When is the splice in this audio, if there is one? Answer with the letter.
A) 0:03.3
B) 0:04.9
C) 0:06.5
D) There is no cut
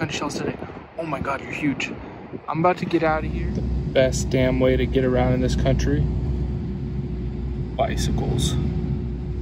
A